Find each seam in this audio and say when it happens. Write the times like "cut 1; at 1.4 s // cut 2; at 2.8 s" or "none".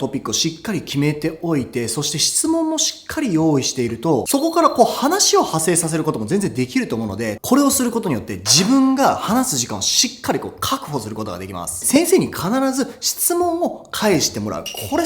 cut 1; at 7.4 s // cut 2; at 11.8 s